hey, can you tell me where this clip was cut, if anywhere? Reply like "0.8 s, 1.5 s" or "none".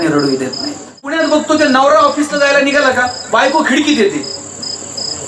1.1 s